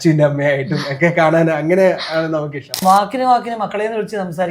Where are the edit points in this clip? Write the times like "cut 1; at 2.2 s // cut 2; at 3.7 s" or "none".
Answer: cut 1; at 2.8 s